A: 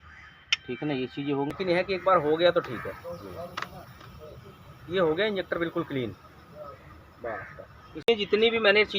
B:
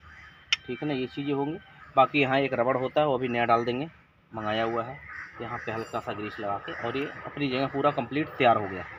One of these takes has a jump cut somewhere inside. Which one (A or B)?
A